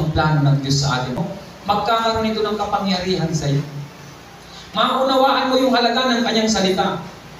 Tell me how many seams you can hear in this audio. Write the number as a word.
one